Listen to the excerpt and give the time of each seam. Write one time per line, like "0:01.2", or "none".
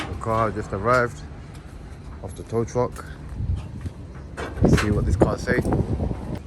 none